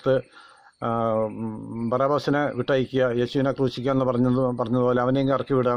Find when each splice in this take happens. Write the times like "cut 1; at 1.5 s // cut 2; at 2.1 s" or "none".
none